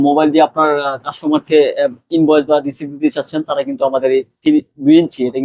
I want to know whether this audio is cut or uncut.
uncut